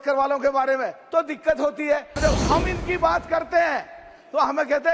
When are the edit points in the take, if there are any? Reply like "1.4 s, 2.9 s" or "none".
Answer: 2.2 s